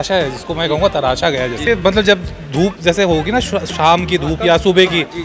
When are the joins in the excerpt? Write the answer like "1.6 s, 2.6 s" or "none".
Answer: 1.7 s